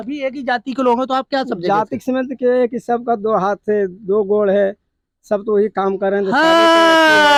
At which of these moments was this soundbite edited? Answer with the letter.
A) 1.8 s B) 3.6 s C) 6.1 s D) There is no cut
D